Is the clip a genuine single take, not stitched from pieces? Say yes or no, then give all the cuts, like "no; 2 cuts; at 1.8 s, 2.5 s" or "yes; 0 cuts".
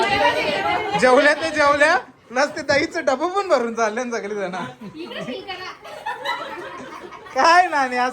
yes; 0 cuts